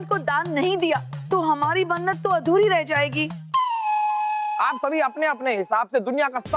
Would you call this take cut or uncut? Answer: cut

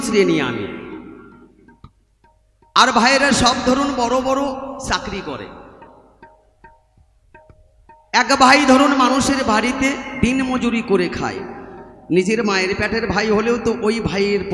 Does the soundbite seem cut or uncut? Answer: uncut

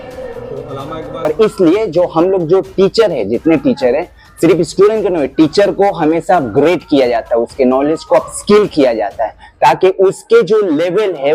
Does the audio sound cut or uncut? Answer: cut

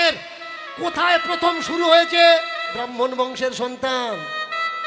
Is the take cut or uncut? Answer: cut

